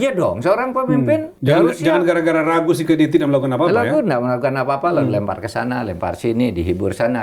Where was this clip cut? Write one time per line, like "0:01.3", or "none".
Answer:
0:01.3